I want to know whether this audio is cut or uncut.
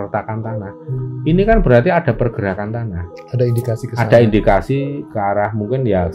uncut